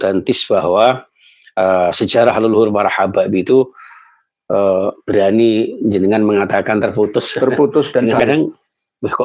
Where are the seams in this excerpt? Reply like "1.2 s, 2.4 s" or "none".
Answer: 8.3 s